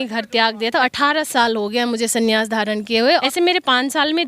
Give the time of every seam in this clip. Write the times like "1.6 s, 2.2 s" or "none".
0.9 s, 3.2 s

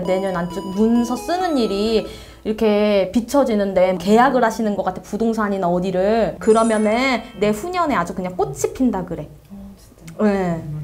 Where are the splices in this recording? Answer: 6.3 s

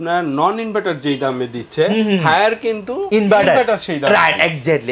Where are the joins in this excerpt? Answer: none

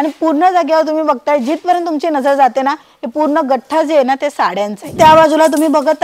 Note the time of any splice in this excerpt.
4.9 s

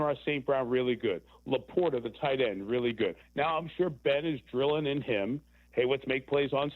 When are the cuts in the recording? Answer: 3.2 s

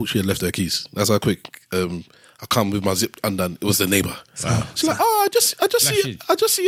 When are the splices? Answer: none

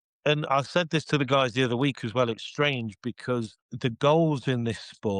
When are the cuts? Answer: 3.6 s

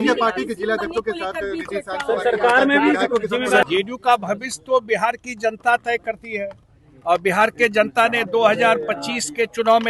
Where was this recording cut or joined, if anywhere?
3.7 s

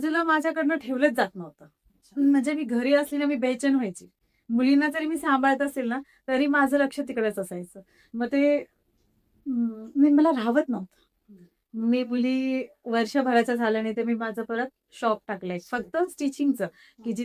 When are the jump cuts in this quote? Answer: none

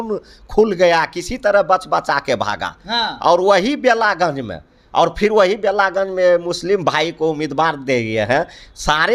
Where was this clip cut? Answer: none

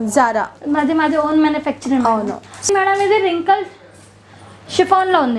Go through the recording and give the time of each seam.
2.5 s

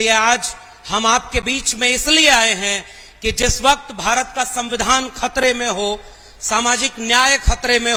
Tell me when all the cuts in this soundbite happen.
none

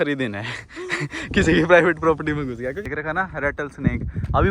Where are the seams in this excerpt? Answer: 2.8 s

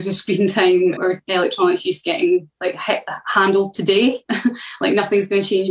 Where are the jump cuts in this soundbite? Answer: none

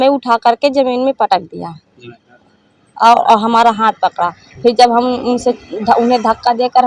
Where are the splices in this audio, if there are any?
none

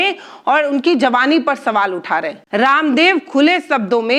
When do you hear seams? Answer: 2.4 s

